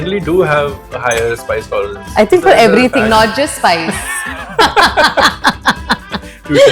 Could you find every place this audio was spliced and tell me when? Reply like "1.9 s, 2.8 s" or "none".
none